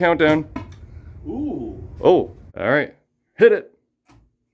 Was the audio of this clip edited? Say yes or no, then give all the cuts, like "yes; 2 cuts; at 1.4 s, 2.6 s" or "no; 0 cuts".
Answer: yes; 1 cut; at 2.4 s